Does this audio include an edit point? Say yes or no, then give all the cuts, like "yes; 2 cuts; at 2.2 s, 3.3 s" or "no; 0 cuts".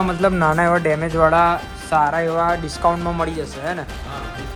no; 0 cuts